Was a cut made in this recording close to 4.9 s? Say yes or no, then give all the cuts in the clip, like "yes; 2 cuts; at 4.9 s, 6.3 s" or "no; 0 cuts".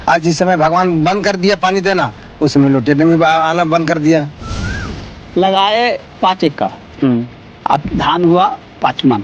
yes; 1 cut; at 4.9 s